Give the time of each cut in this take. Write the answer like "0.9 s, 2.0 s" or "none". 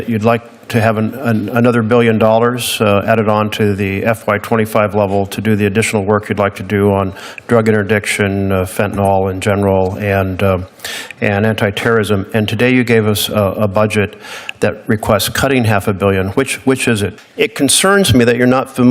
17.1 s